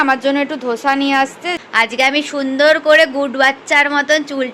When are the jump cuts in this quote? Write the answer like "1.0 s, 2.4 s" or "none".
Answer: 1.6 s